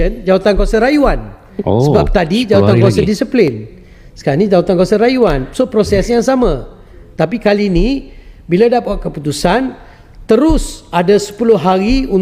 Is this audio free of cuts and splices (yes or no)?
yes